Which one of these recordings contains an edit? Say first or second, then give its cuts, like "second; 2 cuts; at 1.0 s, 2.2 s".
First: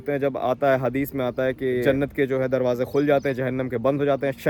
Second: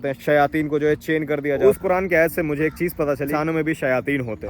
second; 2 cuts; at 1.6 s, 3.3 s